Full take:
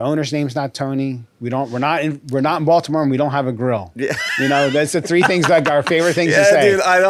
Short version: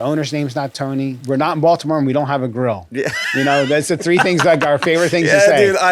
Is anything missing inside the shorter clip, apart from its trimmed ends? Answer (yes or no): yes